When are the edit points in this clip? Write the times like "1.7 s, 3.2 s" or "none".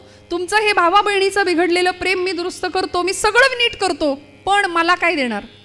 none